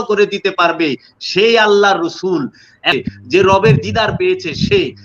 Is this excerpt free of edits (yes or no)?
no